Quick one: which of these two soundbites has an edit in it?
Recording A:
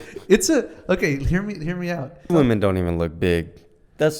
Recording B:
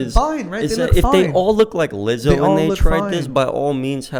A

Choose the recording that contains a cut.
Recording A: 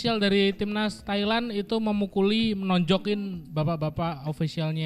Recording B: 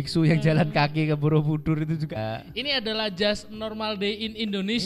B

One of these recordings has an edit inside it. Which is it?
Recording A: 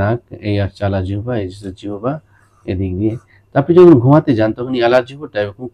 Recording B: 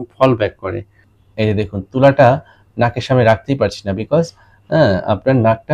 B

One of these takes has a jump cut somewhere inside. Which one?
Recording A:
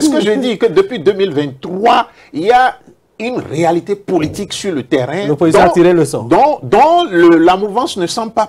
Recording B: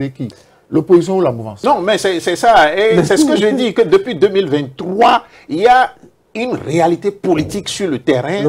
B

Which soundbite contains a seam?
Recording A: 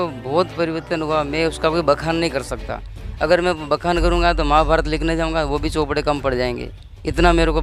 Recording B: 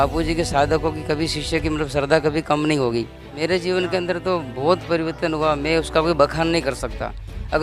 B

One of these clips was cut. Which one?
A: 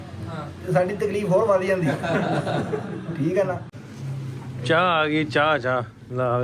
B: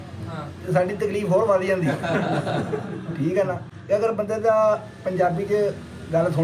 A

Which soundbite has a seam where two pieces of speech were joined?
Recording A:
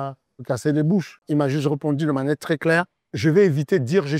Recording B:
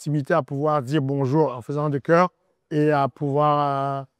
A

